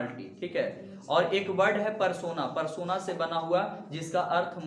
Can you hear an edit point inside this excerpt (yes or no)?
no